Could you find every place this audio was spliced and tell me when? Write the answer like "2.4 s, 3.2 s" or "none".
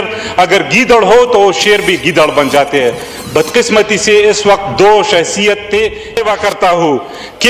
6.1 s

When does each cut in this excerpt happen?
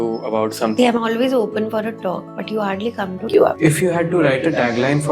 0.7 s, 2.3 s, 3.4 s

